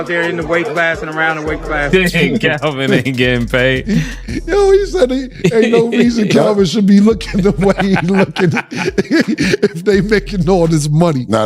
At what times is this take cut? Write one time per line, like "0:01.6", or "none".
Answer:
0:01.9